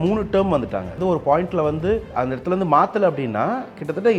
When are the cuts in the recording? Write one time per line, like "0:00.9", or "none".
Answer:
0:01.0
0:02.1